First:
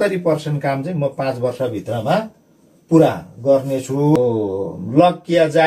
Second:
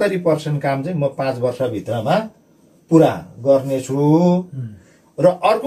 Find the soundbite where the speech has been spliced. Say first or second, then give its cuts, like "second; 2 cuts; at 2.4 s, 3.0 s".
first; 1 cut; at 4.2 s